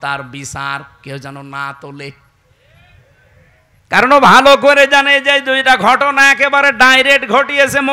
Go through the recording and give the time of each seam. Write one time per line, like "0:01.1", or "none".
none

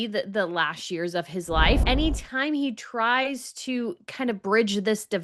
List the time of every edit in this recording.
0:01.8

